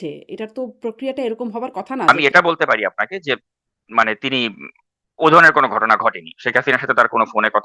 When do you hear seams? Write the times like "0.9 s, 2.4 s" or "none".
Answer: 2.1 s